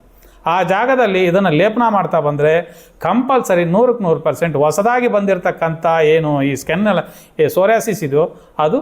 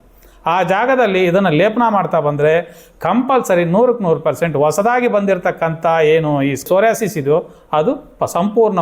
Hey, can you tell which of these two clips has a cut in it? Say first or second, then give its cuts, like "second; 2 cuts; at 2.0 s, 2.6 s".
second; 1 cut; at 6.6 s